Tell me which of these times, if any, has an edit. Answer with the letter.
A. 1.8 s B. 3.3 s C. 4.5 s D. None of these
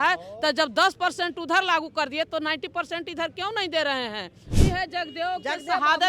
C